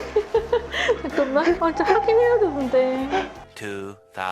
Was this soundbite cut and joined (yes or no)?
yes